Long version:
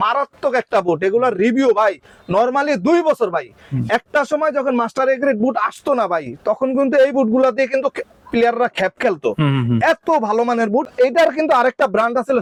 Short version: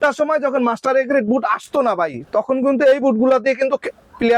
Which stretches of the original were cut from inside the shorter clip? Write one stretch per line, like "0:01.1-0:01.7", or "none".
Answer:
none